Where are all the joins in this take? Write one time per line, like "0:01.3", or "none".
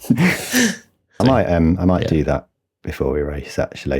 0:01.2